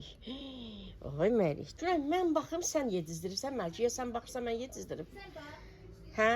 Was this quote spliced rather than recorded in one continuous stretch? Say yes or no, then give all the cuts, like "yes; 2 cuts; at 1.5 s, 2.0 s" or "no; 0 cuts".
yes; 1 cut; at 1.7 s